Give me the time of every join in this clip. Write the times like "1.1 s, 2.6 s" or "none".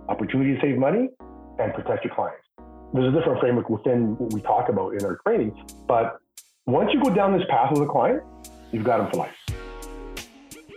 9.4 s